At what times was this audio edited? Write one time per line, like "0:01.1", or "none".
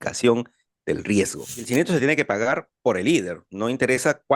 0:01.7